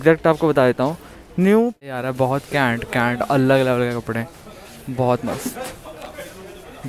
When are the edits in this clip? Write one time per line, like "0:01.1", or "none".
0:01.8